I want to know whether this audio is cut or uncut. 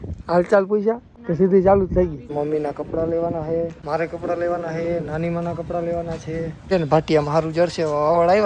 cut